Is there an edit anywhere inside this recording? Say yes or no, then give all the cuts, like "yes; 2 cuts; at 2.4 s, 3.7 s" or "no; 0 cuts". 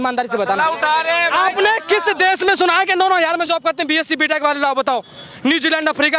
no; 0 cuts